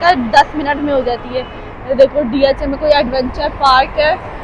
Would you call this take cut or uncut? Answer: uncut